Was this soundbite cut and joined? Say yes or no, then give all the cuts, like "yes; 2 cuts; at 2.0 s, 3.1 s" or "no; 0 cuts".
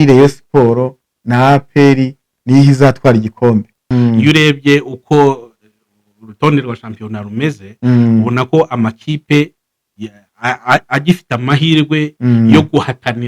yes; 1 cut; at 3.8 s